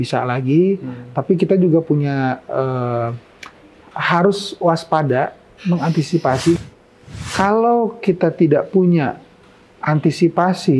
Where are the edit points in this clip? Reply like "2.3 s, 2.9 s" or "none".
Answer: 6.6 s